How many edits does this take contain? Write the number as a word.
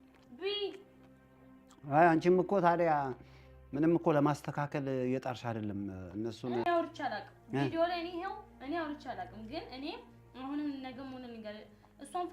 one